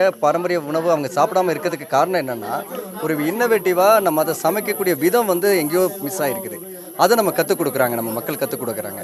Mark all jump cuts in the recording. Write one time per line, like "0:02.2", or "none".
none